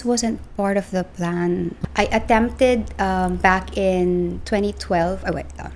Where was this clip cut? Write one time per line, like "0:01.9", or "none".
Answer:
0:01.7